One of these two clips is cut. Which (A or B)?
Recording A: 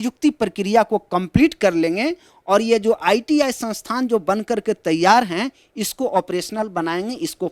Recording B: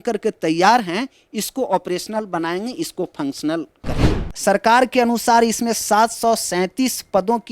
B